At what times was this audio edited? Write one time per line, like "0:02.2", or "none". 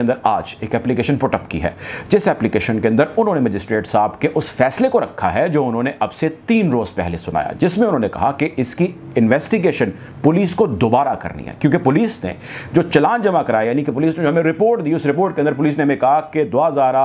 none